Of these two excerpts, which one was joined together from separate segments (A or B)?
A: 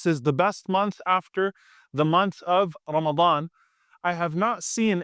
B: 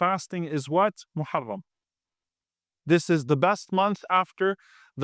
A